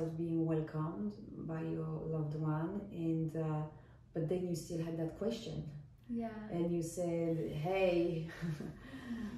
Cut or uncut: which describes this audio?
uncut